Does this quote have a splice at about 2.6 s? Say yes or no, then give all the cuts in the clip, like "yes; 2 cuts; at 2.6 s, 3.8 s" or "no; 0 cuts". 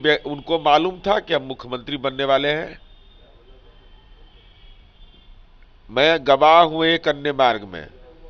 no; 0 cuts